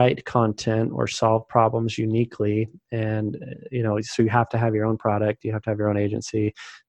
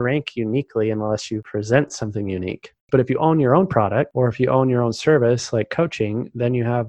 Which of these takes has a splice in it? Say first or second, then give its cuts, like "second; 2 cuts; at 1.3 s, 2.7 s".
second; 3 cuts; at 1.4 s, 2.9 s, 4.1 s